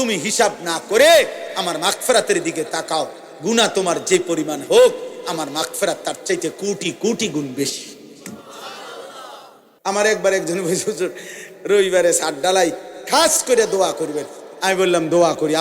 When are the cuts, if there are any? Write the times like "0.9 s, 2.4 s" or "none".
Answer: 9.6 s